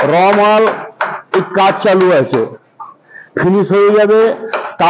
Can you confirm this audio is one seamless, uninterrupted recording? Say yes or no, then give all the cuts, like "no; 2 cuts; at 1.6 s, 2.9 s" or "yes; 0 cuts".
yes; 0 cuts